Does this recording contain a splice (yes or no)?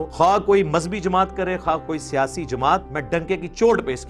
yes